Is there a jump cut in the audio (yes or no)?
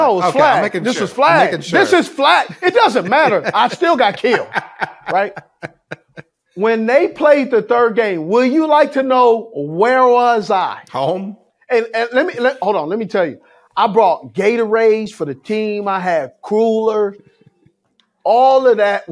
no